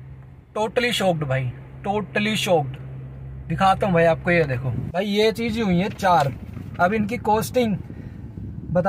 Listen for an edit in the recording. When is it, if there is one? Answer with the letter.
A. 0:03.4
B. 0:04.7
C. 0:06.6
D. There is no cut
B